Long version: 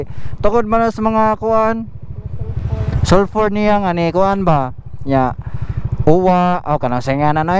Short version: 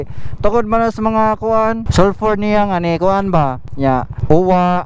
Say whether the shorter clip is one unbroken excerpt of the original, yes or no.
no